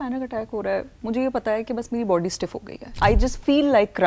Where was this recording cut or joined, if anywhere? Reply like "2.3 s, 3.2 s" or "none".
3.0 s